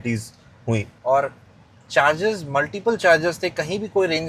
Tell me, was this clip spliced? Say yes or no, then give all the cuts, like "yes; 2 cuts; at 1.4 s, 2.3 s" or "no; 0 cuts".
yes; 1 cut; at 0.9 s